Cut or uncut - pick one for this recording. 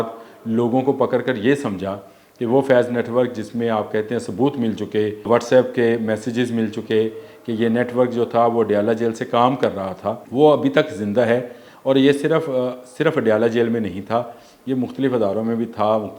cut